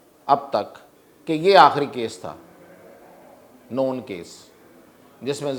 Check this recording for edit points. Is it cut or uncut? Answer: uncut